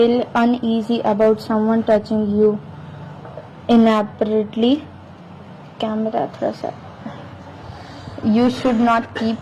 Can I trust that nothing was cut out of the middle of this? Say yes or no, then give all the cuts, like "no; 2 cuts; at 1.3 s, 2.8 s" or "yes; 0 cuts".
yes; 0 cuts